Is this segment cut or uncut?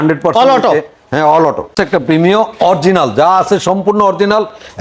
cut